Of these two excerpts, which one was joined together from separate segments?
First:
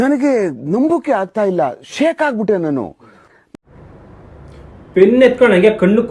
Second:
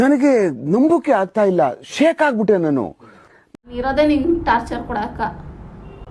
second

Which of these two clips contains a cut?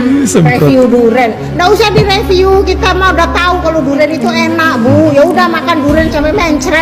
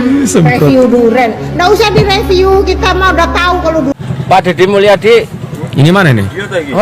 second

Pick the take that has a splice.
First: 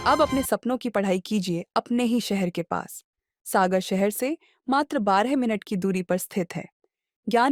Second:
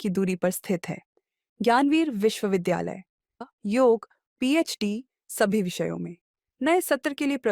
second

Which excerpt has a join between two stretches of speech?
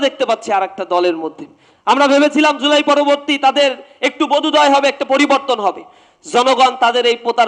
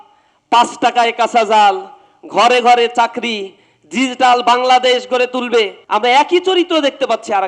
second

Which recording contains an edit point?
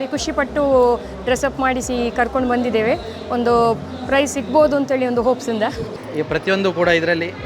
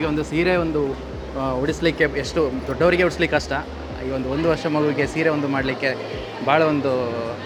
first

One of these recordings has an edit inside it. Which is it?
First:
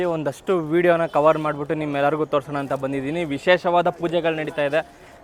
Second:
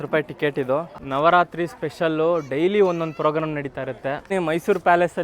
second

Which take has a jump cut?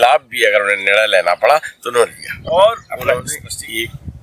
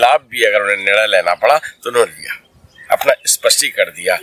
first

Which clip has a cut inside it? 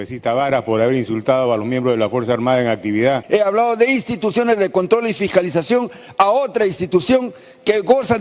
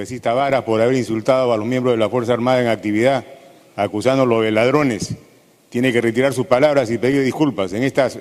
first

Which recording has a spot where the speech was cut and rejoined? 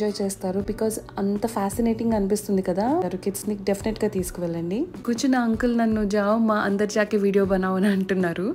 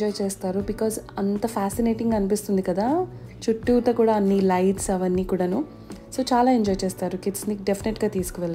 first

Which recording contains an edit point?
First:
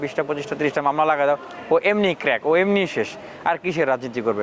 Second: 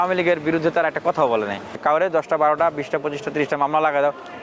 second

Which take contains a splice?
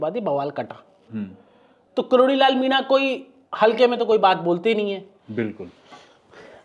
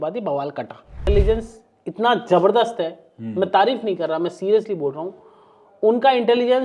second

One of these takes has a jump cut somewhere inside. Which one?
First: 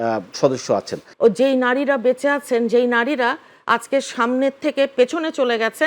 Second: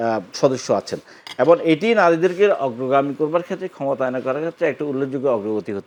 first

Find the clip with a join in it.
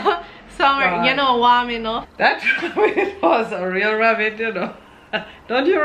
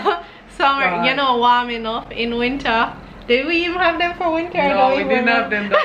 first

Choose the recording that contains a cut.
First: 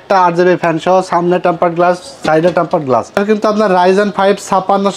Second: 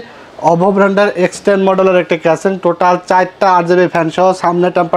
first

